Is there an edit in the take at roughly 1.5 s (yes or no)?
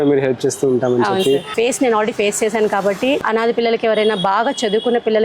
yes